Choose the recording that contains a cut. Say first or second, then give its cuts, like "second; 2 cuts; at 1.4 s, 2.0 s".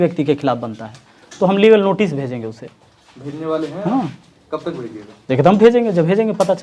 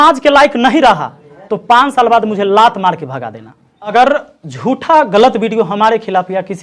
second; 1 cut; at 3.9 s